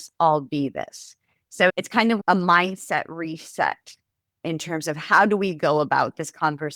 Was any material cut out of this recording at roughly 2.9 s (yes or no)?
no